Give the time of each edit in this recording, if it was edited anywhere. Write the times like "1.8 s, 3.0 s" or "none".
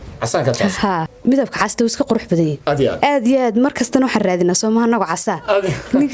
1.1 s